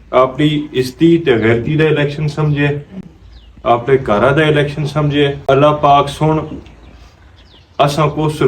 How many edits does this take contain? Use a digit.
1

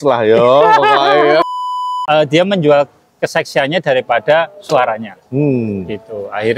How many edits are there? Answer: 1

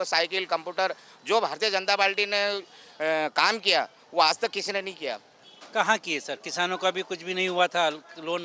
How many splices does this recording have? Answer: 1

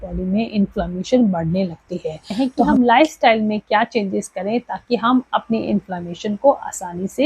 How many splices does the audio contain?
1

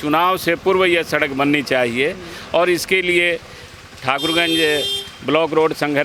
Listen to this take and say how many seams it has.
0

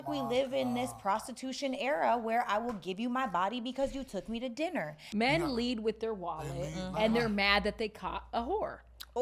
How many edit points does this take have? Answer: 1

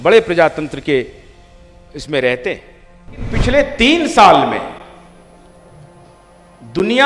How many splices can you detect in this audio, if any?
1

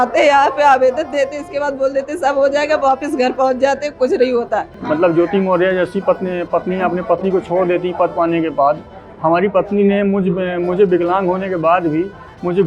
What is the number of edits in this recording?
1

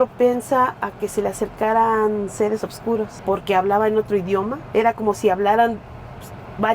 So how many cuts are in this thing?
1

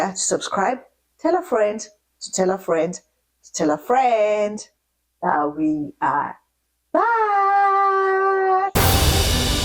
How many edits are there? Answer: 1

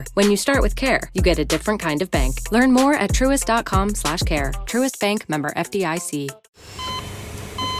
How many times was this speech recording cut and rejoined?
1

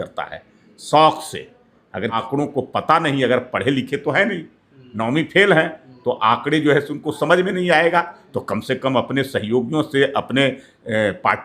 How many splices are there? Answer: 1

